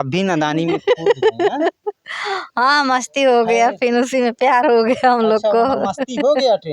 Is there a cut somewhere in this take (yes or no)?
no